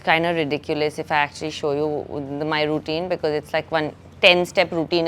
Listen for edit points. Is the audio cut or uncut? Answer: uncut